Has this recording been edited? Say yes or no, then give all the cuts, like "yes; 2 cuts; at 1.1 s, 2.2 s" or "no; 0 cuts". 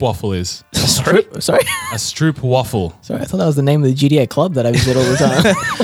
no; 0 cuts